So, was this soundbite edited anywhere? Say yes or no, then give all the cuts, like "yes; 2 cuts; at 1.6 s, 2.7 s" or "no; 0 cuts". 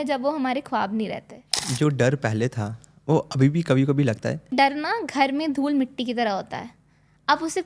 yes; 2 cuts; at 1.7 s, 4.5 s